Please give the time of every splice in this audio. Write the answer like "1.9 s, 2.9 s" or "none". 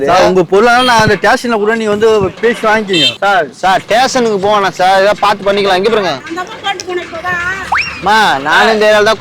3.1 s, 6.2 s